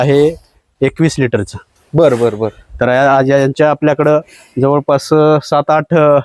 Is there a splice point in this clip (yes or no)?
no